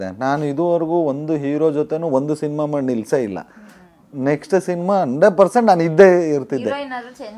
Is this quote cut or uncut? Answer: uncut